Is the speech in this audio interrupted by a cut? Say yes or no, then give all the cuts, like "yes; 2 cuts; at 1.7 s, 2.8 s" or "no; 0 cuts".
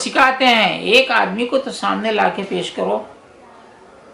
no; 0 cuts